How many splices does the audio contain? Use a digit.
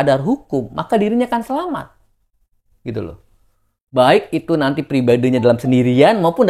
0